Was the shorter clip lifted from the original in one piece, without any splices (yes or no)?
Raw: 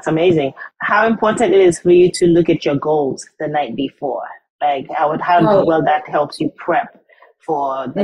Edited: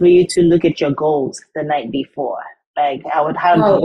yes